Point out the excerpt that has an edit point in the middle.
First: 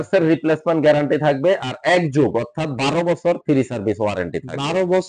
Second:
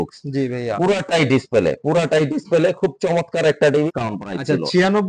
second; 1 cut; at 3.9 s

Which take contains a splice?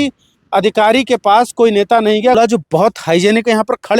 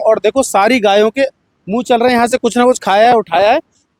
first; 1 cut; at 2.4 s

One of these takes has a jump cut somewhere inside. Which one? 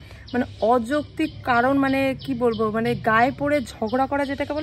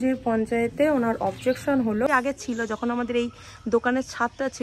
second; 1 cut; at 2.1 s

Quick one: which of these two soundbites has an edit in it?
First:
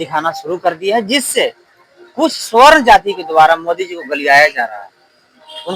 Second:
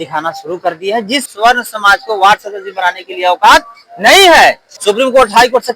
second; 2 cuts; at 1.3 s, 4.7 s

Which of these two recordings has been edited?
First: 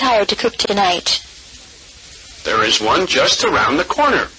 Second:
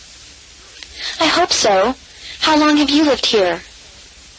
first; 1 cut; at 3.4 s

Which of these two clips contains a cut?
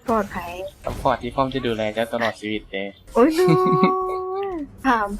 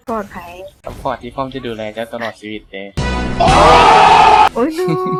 first; 1 cut; at 3.1 s

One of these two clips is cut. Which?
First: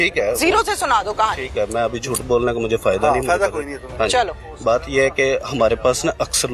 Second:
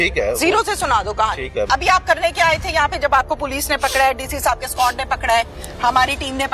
second; 1 cut; at 1.7 s

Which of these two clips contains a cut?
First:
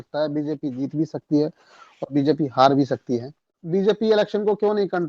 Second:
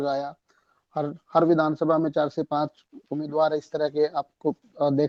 first; 1 cut; at 3.6 s

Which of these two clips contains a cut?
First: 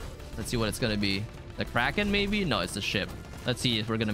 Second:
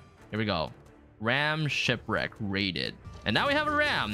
second; 1 cut; at 3.0 s

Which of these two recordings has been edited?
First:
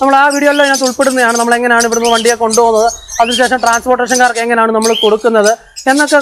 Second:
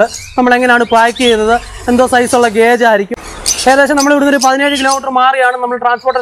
second; 1 cut; at 3.1 s

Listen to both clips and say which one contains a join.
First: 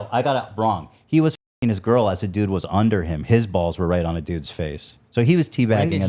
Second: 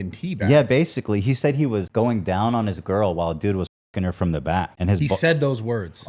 second; 2 cuts; at 1.9 s, 4.7 s

